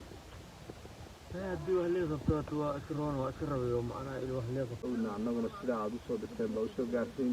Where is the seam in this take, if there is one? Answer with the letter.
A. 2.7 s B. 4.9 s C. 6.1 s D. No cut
B